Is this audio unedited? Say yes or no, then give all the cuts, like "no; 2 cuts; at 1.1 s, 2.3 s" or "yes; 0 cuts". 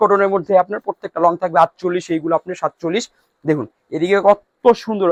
yes; 0 cuts